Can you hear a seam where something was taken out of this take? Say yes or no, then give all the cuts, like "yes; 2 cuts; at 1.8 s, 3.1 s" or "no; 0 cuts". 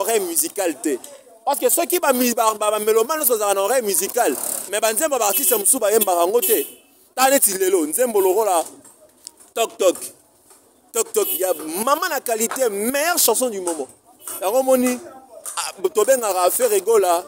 no; 0 cuts